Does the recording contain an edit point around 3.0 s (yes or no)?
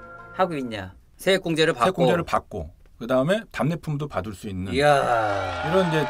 no